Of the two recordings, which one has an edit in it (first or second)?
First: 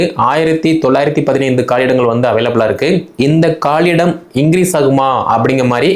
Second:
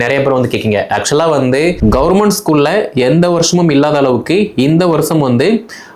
second